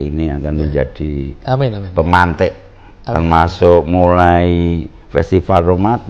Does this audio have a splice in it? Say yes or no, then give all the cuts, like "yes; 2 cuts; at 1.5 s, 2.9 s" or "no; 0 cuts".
no; 0 cuts